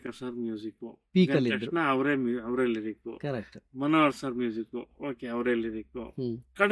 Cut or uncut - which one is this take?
uncut